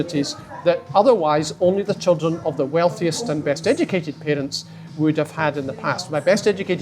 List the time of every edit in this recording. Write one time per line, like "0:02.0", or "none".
none

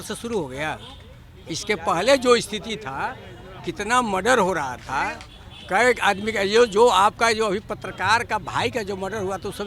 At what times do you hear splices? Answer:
none

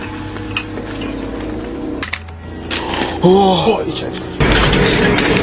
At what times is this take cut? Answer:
0:02.0

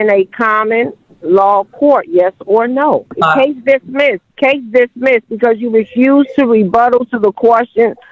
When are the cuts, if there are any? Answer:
0:03.1
0:04.3

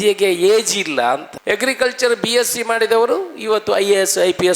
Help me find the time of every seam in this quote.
0:01.3

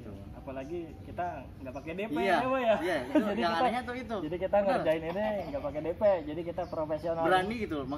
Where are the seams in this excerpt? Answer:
none

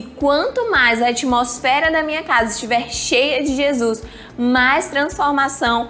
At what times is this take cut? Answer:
none

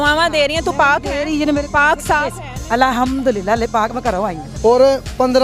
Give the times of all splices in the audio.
0:04.4

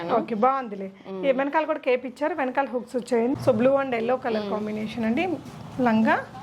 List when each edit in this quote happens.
0:03.3

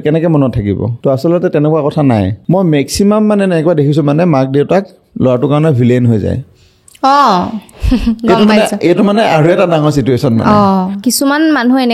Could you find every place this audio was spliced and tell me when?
0:00.9
0:02.4
0:11.0

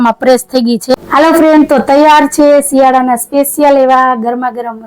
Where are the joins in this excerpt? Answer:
0:00.9

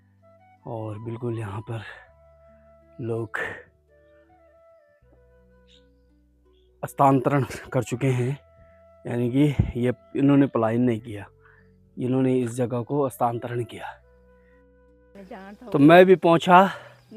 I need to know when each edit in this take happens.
0:03.7
0:06.7
0:14.7

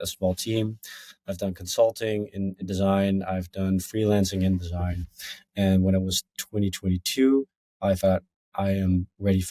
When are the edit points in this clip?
none

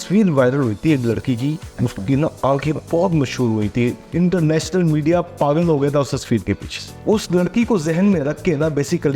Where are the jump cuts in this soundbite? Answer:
0:01.7
0:04.0
0:06.9

